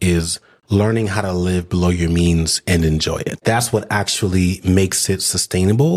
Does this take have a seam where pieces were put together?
yes; 1 cut; at 3.4 s

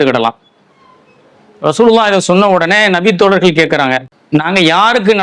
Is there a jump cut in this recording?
yes; 1 cut; at 4.1 s

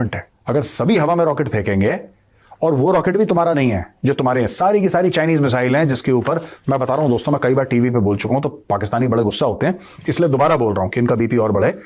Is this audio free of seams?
yes; 0 cuts

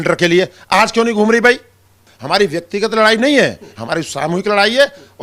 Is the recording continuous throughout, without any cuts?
no; 1 cut; at 2.1 s

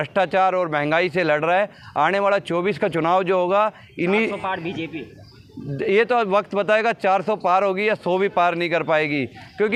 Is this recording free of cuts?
yes; 0 cuts

